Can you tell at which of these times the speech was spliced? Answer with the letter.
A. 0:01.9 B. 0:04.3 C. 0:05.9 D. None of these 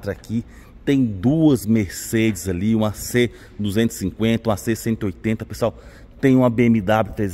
D